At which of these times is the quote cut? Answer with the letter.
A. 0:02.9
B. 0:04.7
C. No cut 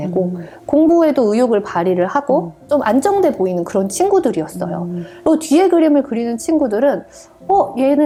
C